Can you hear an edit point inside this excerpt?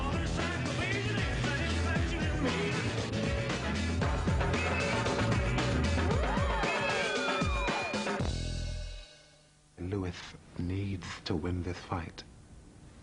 yes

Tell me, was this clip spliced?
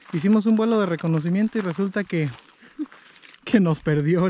no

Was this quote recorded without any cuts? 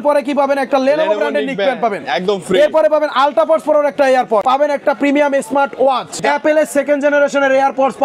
no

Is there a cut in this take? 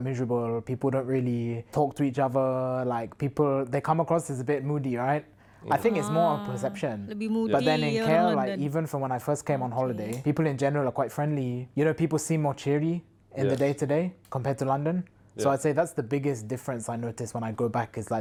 no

